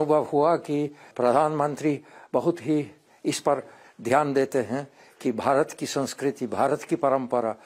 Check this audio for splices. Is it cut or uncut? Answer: cut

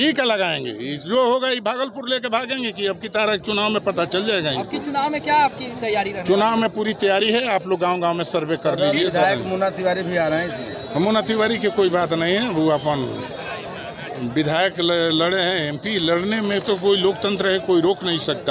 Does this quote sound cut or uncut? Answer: uncut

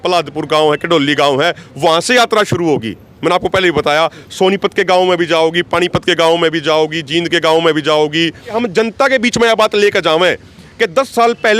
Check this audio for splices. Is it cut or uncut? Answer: cut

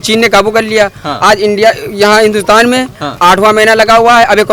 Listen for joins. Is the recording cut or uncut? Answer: uncut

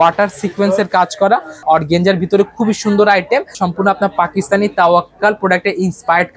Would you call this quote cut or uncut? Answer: cut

